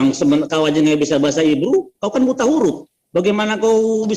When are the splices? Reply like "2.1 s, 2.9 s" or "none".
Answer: none